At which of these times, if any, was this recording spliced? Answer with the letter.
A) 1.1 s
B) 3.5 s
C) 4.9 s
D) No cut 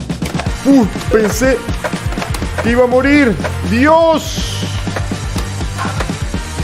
D